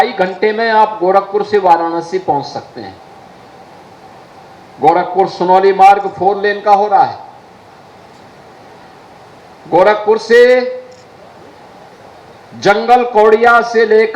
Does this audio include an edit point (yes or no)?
no